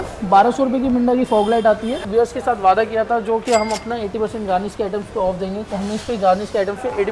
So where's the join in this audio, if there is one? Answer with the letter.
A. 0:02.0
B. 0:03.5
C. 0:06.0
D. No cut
A